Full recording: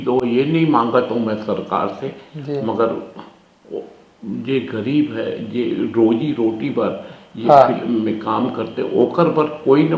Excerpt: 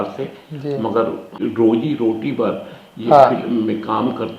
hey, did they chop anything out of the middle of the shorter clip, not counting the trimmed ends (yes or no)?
yes